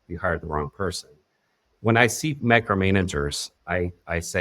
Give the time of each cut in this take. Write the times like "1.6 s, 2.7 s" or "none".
1.7 s